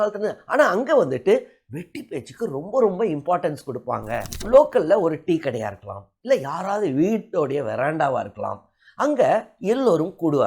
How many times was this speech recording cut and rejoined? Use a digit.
1